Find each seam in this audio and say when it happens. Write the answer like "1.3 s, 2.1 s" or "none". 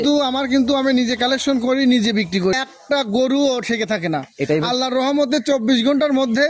2.5 s